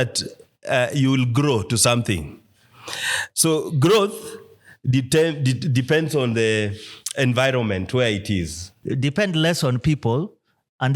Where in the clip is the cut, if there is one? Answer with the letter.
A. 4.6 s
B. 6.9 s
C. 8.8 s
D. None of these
C